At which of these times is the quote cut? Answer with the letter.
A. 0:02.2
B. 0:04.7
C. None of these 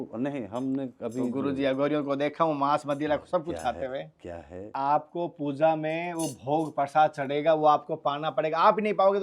B